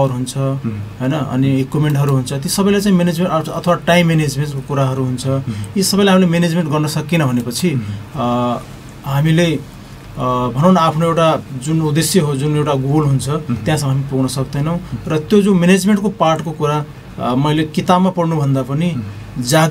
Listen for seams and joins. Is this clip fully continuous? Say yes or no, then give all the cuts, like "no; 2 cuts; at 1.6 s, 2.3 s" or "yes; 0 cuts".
yes; 0 cuts